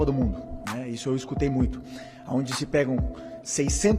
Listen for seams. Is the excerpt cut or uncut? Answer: uncut